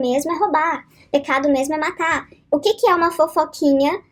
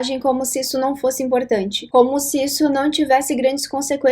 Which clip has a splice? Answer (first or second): second